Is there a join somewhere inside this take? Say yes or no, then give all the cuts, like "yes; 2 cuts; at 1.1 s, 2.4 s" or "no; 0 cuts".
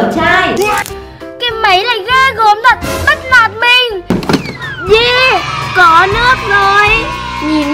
yes; 1 cut; at 3.9 s